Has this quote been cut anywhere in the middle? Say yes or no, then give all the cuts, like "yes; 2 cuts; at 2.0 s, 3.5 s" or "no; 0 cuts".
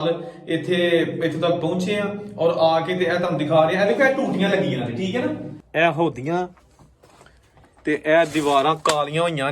yes; 1 cut; at 5.5 s